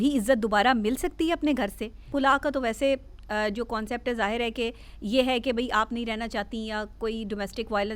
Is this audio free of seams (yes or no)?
no